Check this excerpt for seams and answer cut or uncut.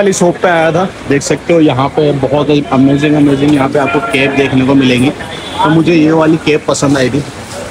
uncut